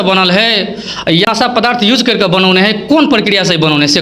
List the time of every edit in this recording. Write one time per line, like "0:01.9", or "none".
0:01.3

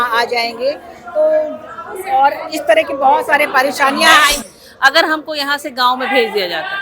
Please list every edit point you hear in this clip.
0:04.4

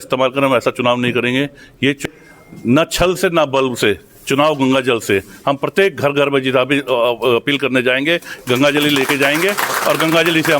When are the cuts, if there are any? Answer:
0:02.0

